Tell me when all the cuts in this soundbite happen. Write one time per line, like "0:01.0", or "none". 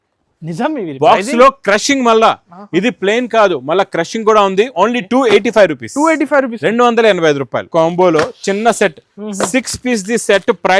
0:07.7